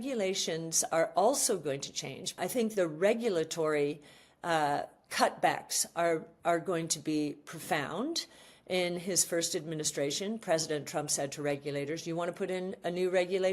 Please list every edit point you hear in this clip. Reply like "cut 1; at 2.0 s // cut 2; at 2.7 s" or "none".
cut 1; at 2.4 s